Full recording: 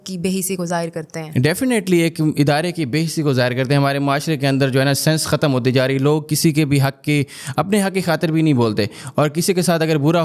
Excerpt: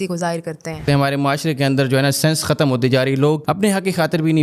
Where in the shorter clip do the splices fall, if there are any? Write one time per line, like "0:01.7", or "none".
0:00.8
0:03.4